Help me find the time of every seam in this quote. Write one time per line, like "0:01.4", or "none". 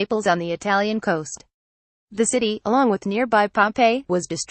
0:02.1
0:03.7